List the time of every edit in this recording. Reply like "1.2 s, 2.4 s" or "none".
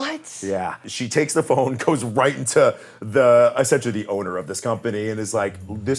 0.9 s